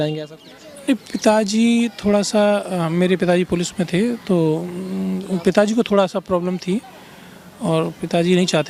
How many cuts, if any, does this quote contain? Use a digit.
0